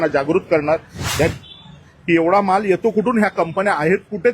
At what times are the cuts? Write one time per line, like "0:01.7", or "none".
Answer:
0:01.3